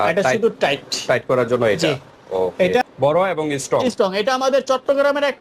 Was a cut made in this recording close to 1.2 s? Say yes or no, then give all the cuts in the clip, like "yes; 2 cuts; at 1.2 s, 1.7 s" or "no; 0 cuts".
no; 1 cut; at 2.5 s